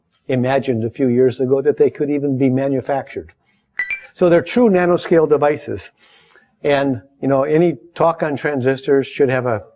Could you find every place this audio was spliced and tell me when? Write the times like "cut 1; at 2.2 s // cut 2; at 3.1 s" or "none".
none